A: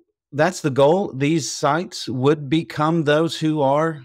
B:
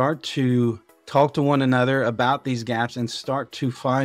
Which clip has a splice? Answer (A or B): B